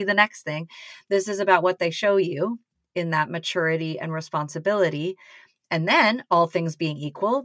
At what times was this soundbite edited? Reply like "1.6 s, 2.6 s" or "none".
none

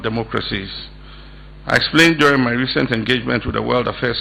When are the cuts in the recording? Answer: none

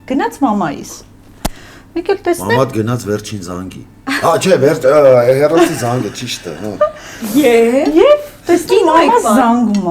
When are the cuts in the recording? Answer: none

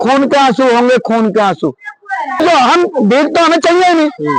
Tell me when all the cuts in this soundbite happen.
2.4 s

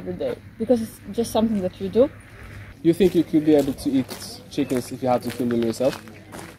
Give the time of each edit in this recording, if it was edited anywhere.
2.6 s

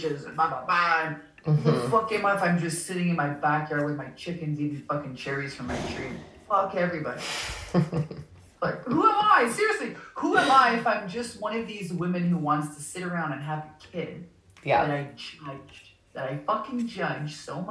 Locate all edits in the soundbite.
8.5 s

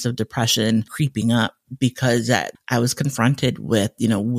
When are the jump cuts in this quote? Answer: 0.9 s, 2.5 s

